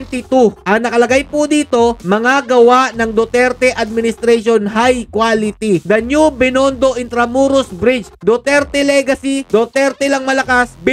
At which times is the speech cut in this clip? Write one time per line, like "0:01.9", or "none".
none